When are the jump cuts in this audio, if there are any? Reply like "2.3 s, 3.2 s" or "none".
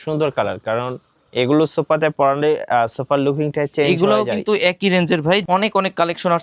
5.4 s